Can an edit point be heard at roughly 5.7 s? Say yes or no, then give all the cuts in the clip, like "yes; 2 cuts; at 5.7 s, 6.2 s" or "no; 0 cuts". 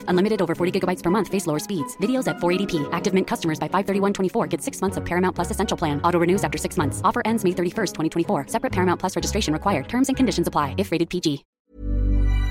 no; 1 cut; at 11.6 s